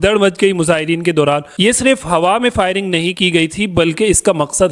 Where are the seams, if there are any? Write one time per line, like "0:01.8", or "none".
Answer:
0:01.5